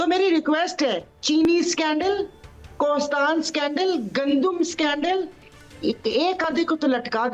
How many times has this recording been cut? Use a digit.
0